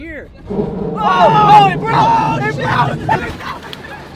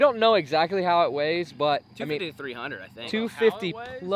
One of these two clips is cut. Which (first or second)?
first